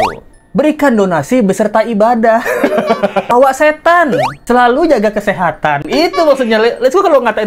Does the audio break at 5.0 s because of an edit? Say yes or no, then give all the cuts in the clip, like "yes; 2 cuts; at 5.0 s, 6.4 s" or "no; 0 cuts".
no; 1 cut; at 3.3 s